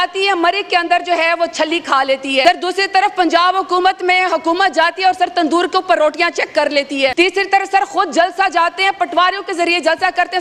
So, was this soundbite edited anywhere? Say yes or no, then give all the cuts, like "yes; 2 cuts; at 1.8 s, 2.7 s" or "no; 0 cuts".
yes; 2 cuts; at 2.4 s, 7.1 s